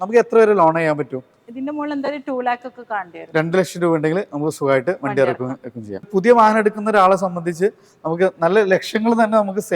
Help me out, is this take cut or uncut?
cut